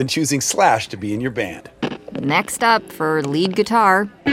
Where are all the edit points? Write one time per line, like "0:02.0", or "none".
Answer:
none